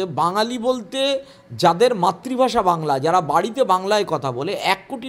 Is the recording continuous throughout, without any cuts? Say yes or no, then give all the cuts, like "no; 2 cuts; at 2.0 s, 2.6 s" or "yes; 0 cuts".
yes; 0 cuts